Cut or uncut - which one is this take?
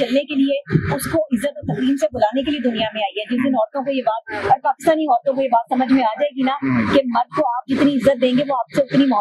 uncut